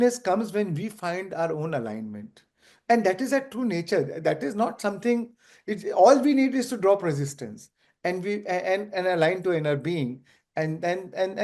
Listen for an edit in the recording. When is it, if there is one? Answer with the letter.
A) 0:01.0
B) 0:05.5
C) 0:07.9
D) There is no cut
D